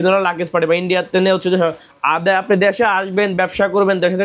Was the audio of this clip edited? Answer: no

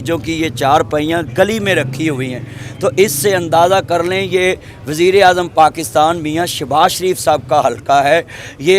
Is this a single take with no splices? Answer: yes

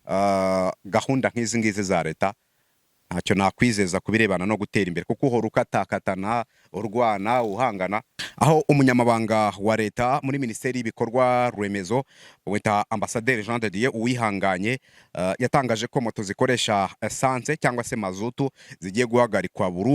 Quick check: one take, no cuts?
no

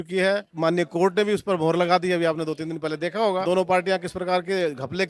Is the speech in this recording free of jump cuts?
yes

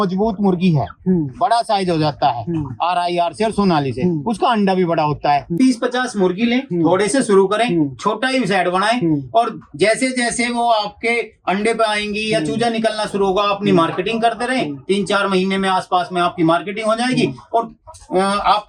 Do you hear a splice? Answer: yes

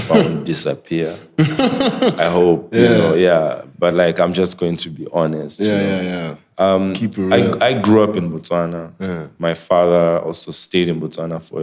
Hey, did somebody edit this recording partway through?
no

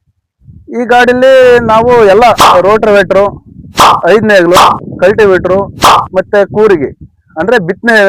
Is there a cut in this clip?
no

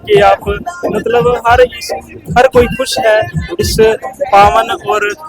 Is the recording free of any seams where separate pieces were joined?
yes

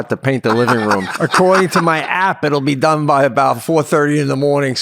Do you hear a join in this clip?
yes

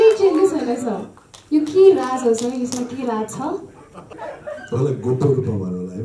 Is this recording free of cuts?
no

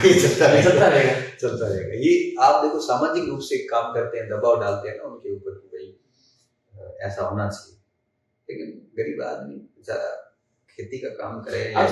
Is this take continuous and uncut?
yes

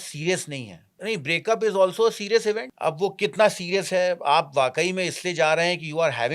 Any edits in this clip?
yes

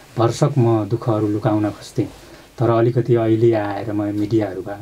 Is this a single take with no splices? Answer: yes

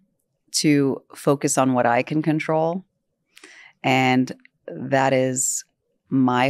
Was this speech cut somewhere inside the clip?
no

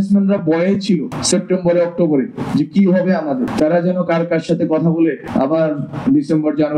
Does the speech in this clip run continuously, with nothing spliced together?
no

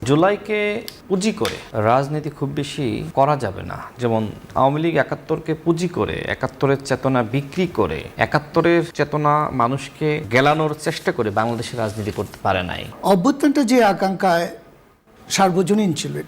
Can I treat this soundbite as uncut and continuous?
no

